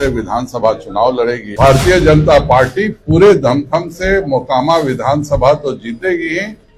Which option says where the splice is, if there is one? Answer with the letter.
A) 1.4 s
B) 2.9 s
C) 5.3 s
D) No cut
A